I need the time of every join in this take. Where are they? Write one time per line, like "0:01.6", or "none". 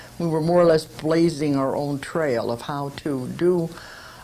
0:03.3